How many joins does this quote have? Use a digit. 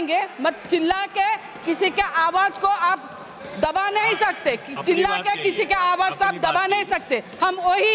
0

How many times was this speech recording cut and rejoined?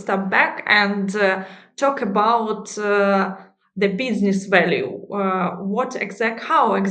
0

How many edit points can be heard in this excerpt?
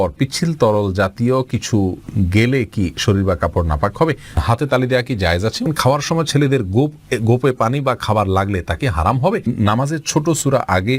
3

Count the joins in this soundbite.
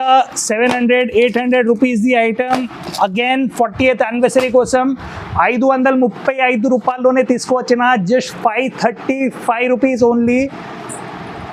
0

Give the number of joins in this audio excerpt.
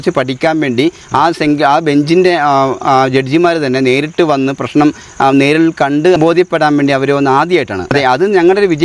2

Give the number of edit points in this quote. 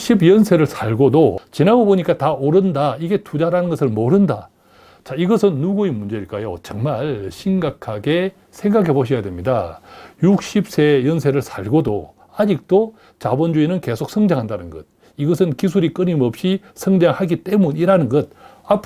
1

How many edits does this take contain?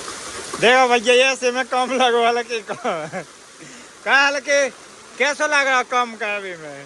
0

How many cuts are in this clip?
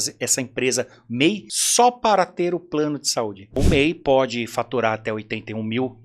2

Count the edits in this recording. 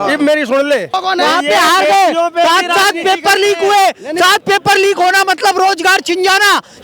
1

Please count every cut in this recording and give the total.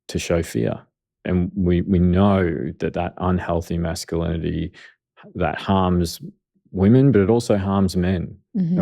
1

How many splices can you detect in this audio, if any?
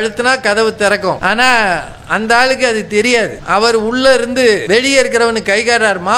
3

